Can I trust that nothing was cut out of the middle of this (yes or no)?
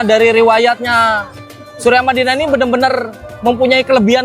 yes